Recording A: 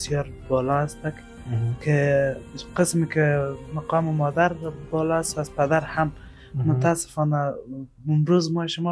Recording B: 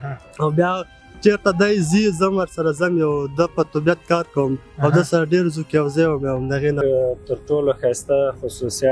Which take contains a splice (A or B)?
B